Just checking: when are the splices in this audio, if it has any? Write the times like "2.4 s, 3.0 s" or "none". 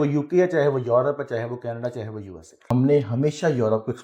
2.6 s